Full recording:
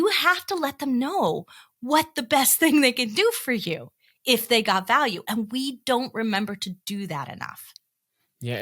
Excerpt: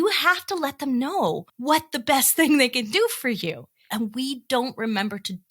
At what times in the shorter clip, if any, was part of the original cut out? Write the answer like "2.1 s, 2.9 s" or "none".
1.5 s, 3.8 s